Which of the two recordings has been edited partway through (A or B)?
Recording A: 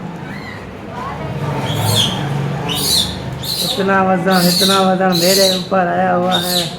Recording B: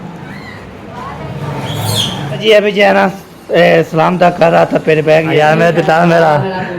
B